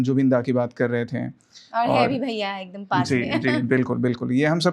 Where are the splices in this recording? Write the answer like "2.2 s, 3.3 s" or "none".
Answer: none